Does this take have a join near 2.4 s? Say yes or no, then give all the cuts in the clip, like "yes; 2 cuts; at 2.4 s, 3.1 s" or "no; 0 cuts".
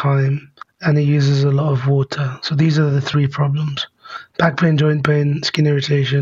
no; 0 cuts